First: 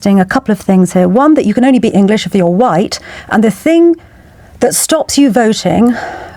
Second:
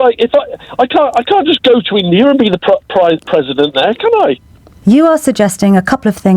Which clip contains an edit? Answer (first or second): second